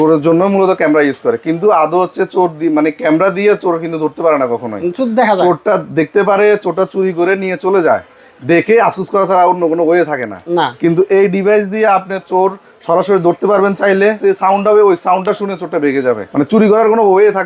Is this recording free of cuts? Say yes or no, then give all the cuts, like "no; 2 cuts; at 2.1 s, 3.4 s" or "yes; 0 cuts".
no; 2 cuts; at 14.2 s, 16.3 s